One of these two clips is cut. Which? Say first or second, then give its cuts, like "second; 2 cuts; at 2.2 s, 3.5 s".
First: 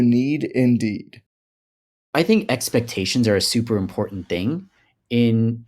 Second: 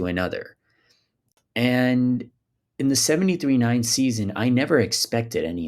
first; 1 cut; at 1.9 s